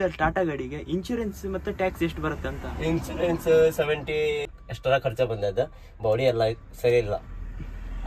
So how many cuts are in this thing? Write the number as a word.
one